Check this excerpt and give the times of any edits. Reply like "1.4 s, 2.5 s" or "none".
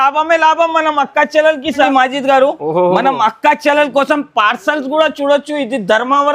1.9 s